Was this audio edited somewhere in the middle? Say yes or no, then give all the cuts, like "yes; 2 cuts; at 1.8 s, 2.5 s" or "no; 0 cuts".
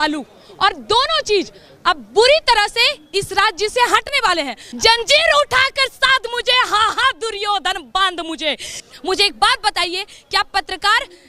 yes; 2 cuts; at 4.6 s, 8.8 s